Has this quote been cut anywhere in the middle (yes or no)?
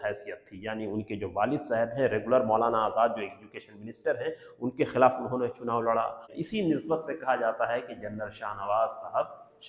yes